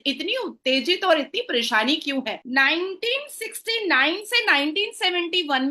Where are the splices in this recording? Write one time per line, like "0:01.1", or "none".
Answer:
0:02.4